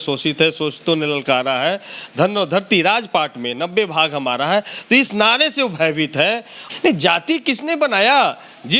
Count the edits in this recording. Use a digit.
1